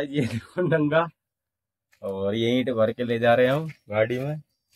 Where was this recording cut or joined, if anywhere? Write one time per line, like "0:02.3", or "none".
none